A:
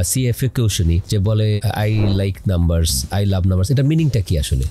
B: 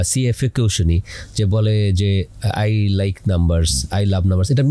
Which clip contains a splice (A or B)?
A